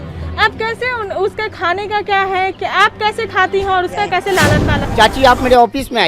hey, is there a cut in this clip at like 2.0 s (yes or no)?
no